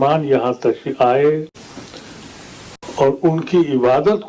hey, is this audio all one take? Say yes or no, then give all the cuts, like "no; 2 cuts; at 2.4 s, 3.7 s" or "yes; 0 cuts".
yes; 0 cuts